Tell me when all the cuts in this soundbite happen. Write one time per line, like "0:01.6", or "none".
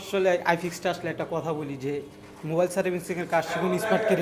none